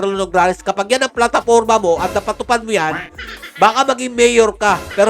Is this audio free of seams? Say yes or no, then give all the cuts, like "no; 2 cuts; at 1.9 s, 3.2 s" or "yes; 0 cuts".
yes; 0 cuts